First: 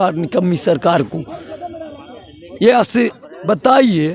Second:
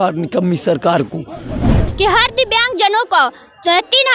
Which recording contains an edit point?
second; 1 cut; at 1.8 s

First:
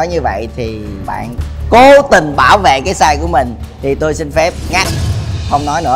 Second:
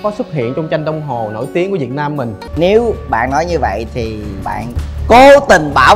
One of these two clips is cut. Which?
second; 1 cut; at 2.4 s

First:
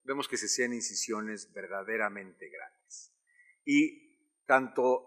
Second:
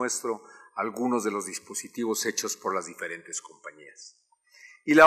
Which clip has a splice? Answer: first; 1 cut; at 2.6 s

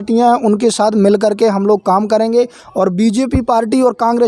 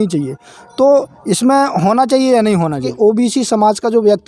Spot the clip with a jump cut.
second; 1 cut; at 2.9 s

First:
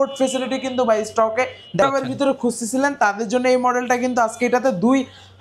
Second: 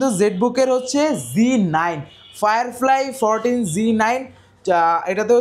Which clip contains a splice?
first; 1 cut; at 1.8 s

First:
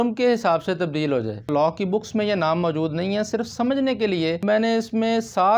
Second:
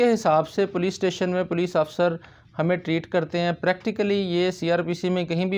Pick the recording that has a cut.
first; 2 cuts; at 1.5 s, 4.4 s

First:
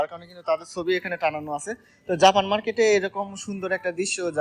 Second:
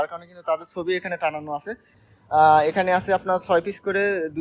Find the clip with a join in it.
second; 1 cut; at 1.9 s

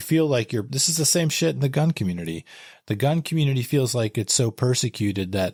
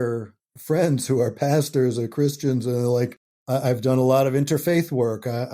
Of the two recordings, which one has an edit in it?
second; 1 cut; at 3.3 s

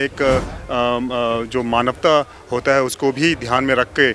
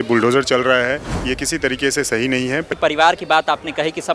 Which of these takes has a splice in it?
second; 1 cut; at 2.7 s

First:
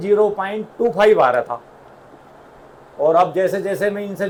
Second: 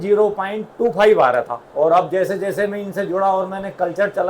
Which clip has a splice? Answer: second; 1 cut; at 1.6 s

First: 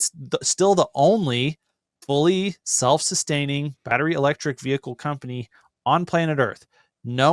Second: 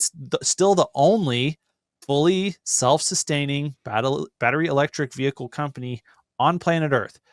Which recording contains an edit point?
first; 1 cut; at 3.8 s

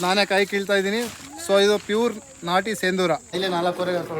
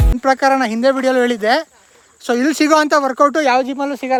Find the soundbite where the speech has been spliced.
first; 1 cut; at 3.3 s

